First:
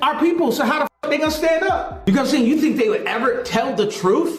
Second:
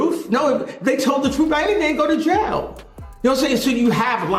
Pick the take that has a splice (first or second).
first